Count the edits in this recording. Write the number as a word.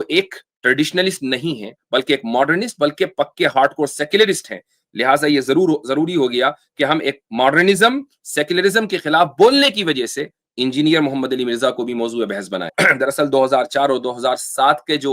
one